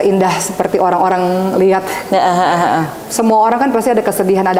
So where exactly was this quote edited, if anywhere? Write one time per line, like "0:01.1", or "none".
none